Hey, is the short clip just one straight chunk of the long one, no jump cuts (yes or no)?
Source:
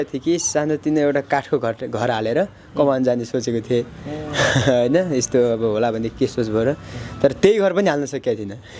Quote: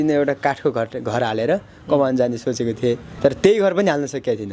no